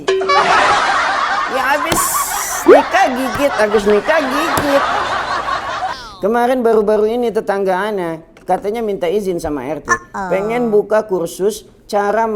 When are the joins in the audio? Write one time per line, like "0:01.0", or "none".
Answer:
0:06.0